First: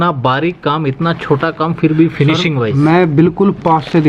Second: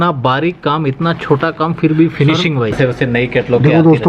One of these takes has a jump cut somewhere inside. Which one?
second; 1 cut; at 2.7 s

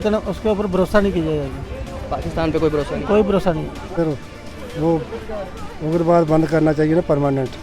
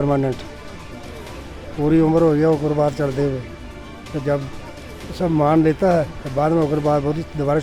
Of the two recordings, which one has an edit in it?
first; 1 cut; at 3.9 s

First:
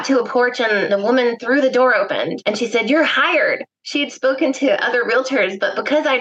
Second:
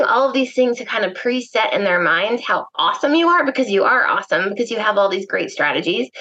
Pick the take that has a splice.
first; 2 cuts; at 0.9 s, 2.3 s

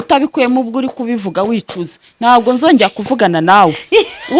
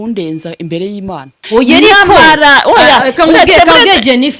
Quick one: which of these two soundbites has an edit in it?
second; 1 cut; at 1.4 s

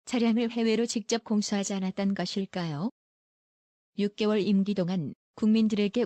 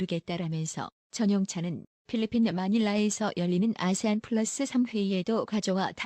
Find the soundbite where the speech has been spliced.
second; 1 cut; at 2.8 s

